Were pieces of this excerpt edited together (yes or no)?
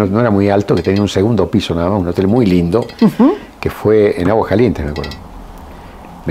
no